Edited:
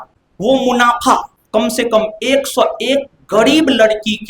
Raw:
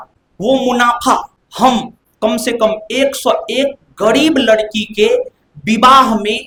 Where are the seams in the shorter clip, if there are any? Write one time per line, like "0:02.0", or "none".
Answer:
0:01.4